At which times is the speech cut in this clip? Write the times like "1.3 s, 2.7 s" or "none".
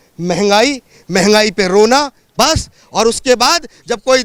none

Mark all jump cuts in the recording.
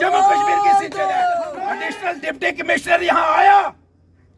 1.6 s

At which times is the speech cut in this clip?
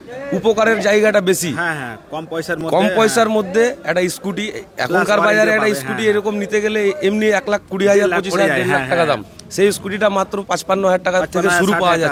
none

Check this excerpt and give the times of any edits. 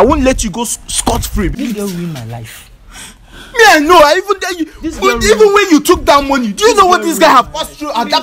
1.6 s

